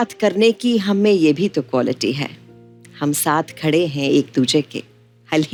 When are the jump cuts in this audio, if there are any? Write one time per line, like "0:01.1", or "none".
none